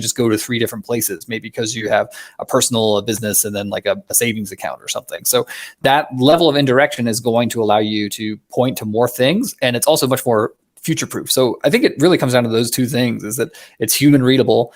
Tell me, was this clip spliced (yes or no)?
yes